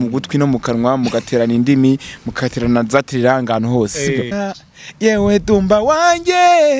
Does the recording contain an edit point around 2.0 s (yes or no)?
no